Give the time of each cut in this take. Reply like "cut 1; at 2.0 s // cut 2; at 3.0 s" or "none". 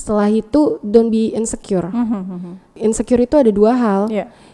cut 1; at 2.8 s